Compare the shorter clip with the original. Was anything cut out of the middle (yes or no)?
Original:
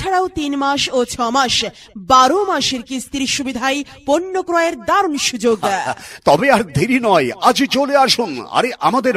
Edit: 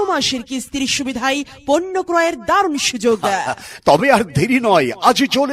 no